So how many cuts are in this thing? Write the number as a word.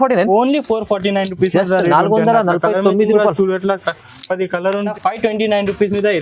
one